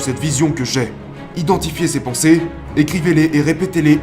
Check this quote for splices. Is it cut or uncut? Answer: cut